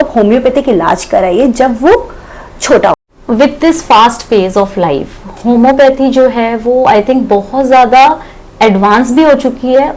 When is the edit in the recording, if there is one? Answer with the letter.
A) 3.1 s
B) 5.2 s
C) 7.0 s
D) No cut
A